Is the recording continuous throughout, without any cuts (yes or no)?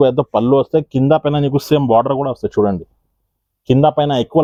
yes